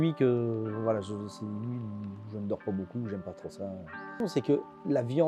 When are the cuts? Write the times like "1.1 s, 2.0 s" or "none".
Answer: 4.1 s

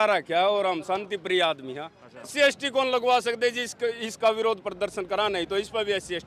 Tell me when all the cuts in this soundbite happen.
2.3 s

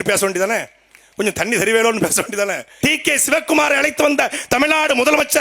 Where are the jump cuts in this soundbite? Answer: 2.7 s

